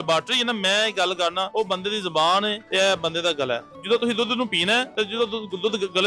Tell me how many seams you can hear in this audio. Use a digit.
4